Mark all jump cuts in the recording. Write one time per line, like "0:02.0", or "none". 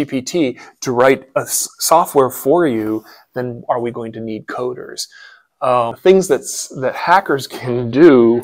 0:06.0